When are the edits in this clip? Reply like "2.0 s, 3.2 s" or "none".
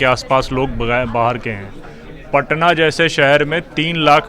none